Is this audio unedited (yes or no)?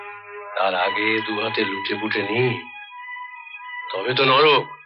yes